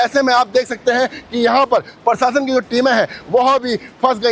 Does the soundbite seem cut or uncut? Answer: uncut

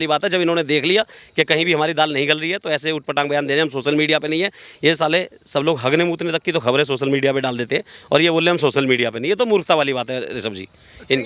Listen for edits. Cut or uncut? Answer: uncut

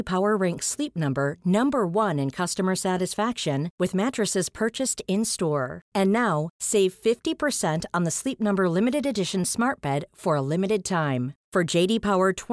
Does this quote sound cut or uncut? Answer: uncut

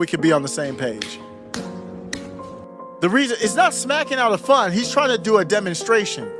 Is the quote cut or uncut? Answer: uncut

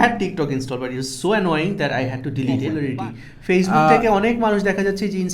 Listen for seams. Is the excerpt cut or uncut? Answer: cut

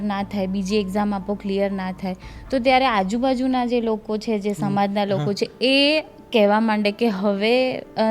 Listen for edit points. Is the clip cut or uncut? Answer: uncut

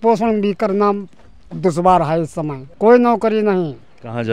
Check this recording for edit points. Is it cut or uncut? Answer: cut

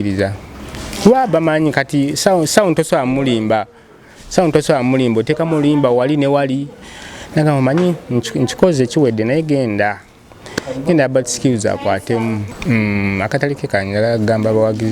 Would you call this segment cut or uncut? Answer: cut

